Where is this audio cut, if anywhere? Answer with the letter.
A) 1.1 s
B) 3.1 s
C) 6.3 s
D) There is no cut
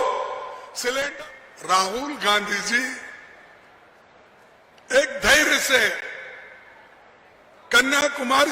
A